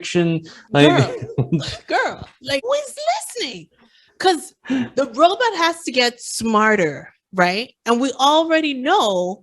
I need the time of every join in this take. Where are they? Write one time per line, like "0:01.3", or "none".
0:02.7